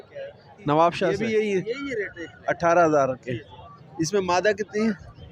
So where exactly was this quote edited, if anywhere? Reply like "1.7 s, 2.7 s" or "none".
1.2 s